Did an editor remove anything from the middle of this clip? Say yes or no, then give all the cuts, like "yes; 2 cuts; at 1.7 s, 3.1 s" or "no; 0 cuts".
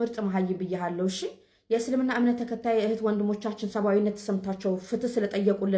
no; 0 cuts